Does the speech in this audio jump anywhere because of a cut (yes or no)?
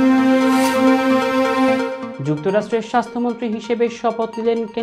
no